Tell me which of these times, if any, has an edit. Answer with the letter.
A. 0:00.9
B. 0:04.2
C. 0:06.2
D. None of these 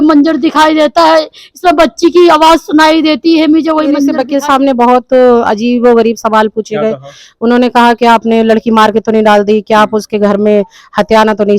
B